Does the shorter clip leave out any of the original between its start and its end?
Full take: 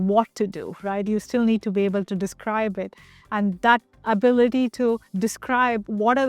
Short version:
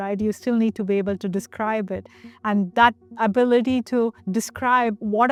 no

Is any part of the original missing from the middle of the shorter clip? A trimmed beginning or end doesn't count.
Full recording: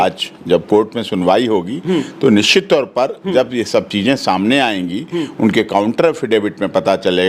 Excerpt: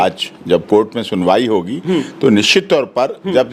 no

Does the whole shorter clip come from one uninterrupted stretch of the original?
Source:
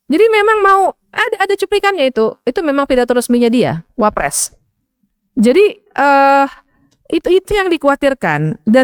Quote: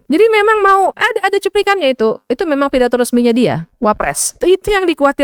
no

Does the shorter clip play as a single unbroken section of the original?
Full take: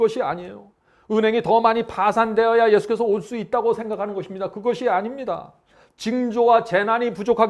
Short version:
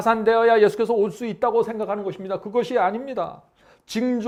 yes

